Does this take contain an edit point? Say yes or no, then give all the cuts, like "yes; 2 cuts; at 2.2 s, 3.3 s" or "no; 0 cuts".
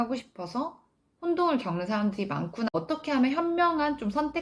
yes; 1 cut; at 2.7 s